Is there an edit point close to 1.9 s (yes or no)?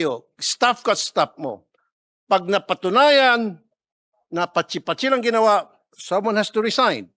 no